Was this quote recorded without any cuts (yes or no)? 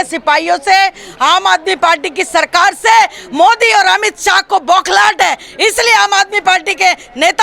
yes